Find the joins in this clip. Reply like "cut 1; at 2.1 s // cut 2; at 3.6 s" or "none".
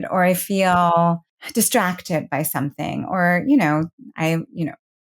cut 1; at 1.4 s